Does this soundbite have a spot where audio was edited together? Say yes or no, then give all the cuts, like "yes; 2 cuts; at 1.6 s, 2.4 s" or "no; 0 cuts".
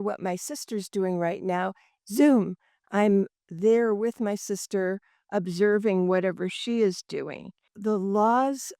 yes; 1 cut; at 7.7 s